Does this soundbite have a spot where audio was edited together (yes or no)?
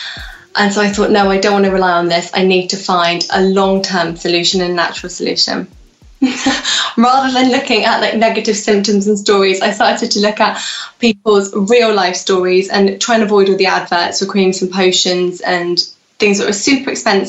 no